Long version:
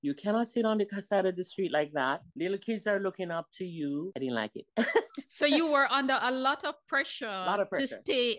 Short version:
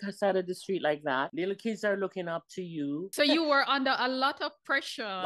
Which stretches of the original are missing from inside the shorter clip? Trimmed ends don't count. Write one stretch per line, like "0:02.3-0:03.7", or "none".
0:02.2-0:02.3
0:04.1-0:05.3